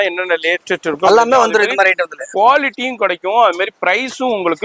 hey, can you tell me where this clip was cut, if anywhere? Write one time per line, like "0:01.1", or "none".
none